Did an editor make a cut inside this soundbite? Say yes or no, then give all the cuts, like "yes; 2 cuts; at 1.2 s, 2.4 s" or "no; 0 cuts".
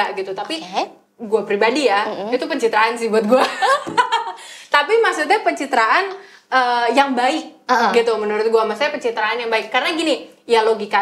no; 0 cuts